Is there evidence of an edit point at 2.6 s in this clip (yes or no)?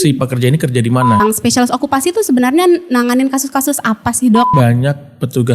no